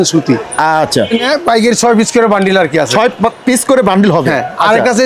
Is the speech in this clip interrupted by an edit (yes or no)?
yes